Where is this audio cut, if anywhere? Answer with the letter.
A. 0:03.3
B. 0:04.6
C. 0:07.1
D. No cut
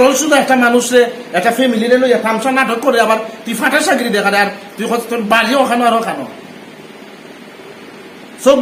D